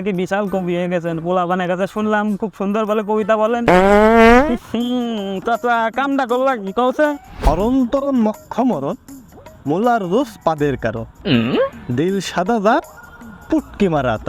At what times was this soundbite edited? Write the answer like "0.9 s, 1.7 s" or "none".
3.6 s, 7.3 s